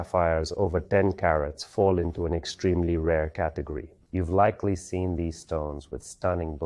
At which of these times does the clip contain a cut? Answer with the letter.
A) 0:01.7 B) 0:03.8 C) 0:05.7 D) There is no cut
B